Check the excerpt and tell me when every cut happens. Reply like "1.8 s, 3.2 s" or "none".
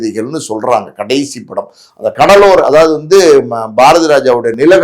none